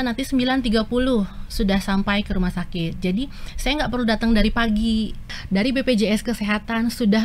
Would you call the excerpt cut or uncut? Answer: cut